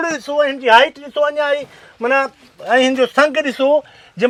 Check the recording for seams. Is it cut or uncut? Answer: uncut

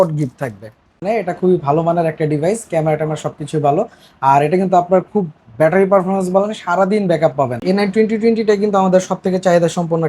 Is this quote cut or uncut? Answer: cut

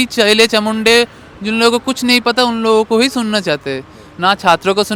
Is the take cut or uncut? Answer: uncut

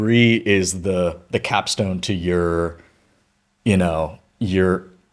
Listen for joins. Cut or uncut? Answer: uncut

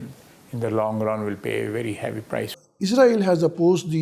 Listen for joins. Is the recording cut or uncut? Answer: cut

